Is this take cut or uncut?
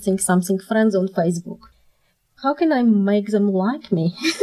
uncut